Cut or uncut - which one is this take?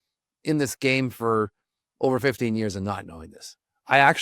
uncut